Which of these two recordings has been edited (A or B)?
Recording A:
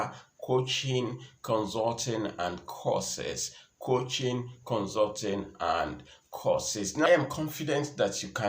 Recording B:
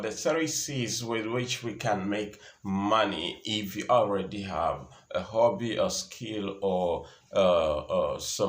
A